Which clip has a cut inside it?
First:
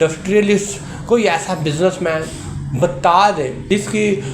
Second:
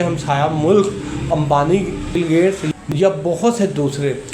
second; 1 cut; at 2.9 s

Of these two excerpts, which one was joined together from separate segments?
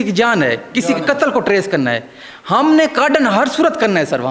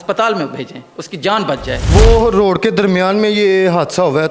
second; 1 cut; at 1.8 s

